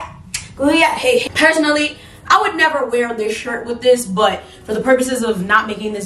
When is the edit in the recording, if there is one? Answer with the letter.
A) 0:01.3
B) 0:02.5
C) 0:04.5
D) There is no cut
D